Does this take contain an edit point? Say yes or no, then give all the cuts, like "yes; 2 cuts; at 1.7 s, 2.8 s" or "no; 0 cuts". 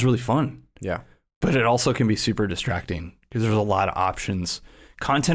no; 0 cuts